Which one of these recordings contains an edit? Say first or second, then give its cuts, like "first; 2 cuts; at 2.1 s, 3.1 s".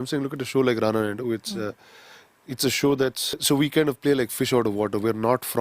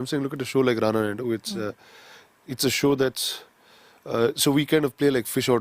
first; 1 cut; at 3.4 s